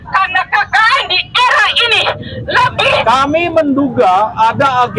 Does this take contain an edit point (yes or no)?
yes